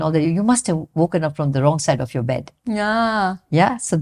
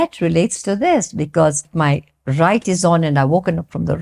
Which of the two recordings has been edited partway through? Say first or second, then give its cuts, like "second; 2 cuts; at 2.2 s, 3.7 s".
second; 1 cut; at 1.7 s